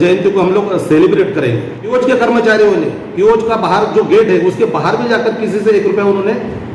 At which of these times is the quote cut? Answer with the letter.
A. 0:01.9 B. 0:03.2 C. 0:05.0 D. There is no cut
A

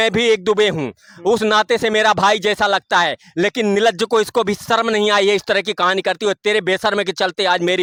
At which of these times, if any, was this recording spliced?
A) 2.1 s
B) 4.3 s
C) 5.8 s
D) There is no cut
D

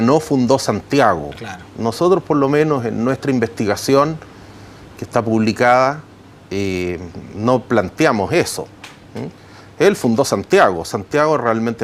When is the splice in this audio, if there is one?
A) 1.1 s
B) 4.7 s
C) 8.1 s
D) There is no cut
C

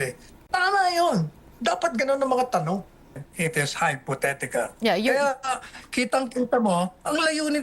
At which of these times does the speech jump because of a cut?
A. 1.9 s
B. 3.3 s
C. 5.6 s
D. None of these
B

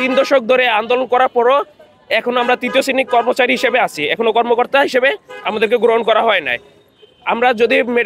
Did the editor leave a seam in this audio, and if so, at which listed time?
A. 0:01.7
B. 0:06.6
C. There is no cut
C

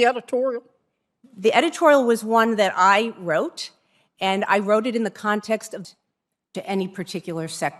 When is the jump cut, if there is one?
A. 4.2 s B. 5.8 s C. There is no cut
B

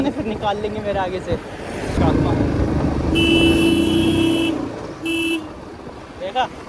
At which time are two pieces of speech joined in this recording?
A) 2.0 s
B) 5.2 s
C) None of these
A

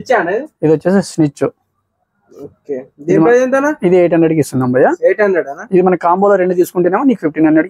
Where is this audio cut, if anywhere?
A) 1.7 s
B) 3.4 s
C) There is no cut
C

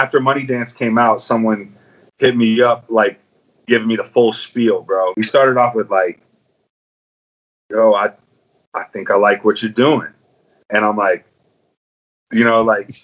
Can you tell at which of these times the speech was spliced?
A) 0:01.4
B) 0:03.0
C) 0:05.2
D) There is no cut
C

